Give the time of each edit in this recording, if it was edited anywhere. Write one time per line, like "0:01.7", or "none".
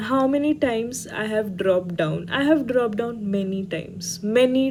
none

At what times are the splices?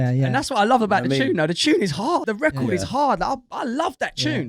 0:02.2

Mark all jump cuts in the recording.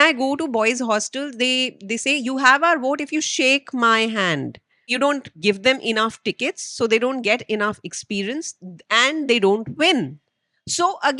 0:04.9

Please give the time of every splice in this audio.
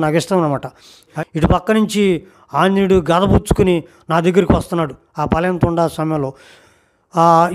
0:01.1
0:06.6

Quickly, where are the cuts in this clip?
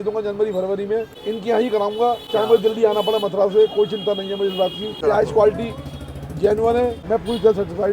0:01.1
0:02.2
0:05.0
0:07.0

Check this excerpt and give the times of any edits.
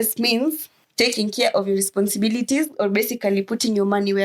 none

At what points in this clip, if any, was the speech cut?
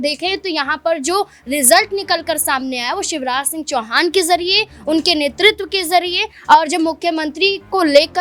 none

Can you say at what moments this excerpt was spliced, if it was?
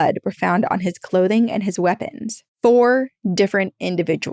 none

